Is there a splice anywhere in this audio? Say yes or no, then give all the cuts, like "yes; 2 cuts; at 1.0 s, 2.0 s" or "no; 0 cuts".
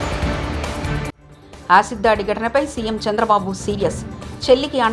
no; 0 cuts